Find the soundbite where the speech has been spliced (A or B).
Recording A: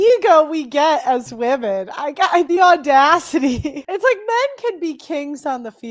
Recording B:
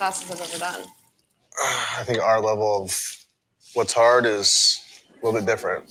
A